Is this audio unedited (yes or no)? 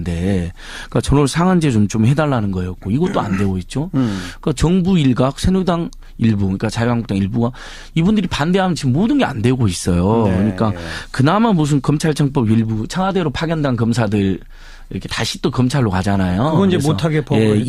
yes